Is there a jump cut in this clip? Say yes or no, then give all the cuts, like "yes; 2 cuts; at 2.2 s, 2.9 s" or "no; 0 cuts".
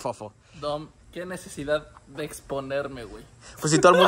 no; 0 cuts